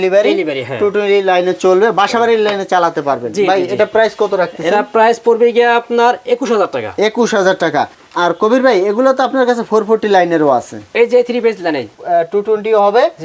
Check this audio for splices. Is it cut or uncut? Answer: uncut